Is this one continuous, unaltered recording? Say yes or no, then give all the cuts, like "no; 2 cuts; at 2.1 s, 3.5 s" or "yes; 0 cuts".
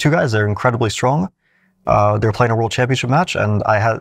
yes; 0 cuts